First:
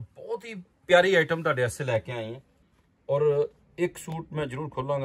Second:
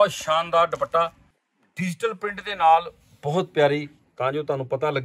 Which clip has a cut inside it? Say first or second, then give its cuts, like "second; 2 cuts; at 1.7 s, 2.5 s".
second; 1 cut; at 4.0 s